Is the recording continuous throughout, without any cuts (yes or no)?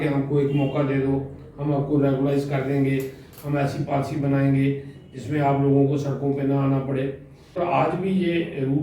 no